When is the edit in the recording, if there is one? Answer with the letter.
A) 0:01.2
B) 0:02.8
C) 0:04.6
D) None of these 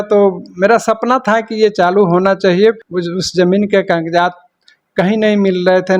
B